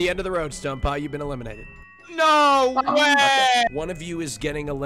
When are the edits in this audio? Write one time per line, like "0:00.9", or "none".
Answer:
0:03.7